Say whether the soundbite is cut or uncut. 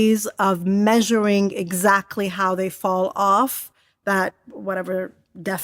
uncut